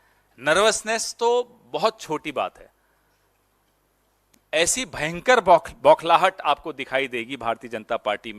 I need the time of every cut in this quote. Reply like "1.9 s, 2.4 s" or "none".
none